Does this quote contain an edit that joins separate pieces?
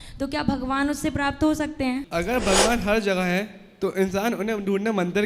yes; 1 cut; at 2.0 s

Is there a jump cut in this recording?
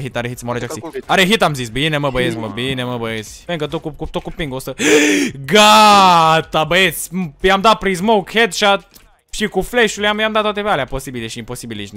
yes; 1 cut; at 3.3 s

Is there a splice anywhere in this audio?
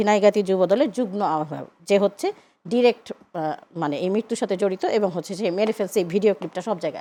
no; 0 cuts

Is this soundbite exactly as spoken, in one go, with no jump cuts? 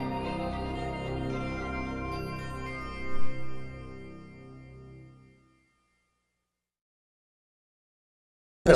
yes; 0 cuts

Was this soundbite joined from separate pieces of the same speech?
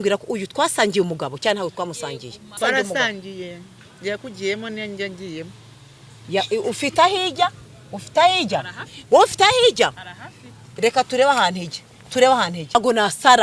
yes; 2 cuts; at 2.6 s, 12.8 s

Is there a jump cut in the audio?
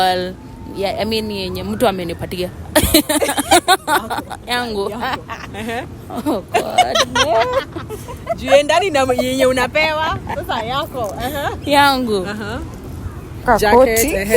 yes; 1 cut; at 13.4 s

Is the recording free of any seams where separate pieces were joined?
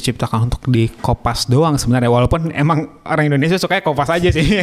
yes; 0 cuts

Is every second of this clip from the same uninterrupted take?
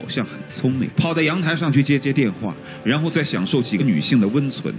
no; 1 cut; at 0.9 s

